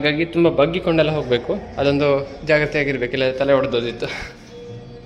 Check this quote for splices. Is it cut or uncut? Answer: uncut